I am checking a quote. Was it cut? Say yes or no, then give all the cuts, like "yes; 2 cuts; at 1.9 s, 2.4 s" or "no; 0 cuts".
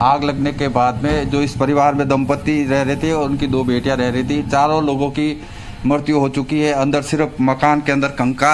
no; 0 cuts